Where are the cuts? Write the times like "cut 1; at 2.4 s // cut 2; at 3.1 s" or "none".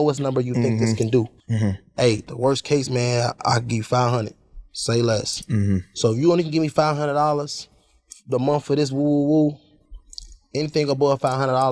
cut 1; at 1.4 s // cut 2; at 2.3 s